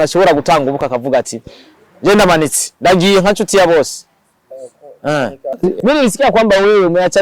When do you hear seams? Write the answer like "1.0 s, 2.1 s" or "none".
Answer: 5.5 s